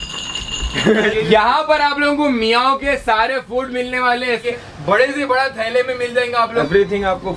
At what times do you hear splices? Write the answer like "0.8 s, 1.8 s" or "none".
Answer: 1.1 s, 4.4 s, 6.5 s